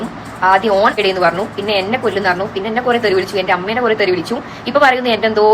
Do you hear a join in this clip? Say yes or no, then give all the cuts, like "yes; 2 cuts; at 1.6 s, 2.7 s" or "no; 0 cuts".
no; 0 cuts